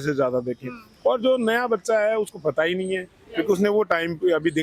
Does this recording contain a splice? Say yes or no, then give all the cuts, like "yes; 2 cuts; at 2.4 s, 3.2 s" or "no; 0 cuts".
no; 0 cuts